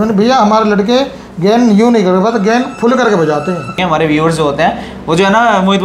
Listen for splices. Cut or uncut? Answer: cut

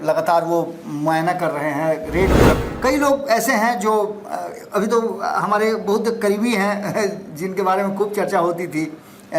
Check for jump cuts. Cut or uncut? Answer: cut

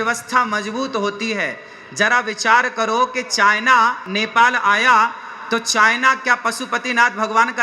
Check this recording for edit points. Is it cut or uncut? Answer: cut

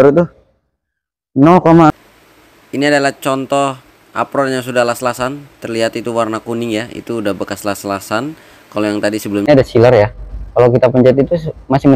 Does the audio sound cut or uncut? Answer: cut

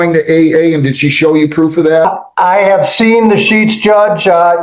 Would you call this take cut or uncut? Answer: cut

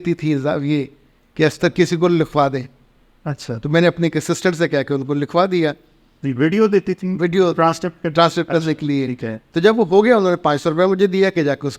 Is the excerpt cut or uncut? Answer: uncut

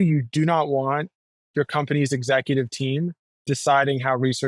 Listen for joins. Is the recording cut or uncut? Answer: uncut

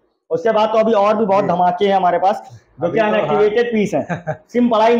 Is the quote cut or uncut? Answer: uncut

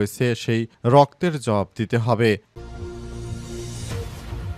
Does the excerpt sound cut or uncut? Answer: cut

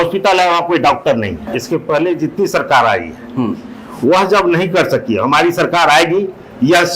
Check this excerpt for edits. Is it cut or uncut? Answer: cut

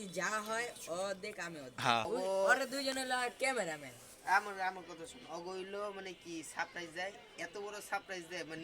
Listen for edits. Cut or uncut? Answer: cut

